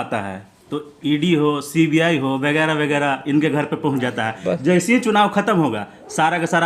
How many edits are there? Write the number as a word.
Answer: zero